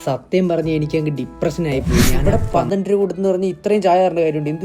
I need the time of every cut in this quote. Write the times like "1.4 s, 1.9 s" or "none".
2.2 s